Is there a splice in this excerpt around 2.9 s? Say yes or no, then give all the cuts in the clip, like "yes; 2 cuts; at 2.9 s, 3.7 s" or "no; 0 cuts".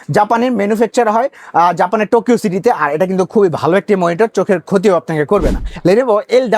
no; 1 cut; at 5.6 s